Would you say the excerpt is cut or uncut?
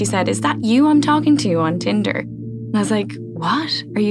uncut